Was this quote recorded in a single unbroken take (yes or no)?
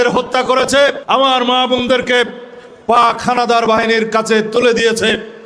no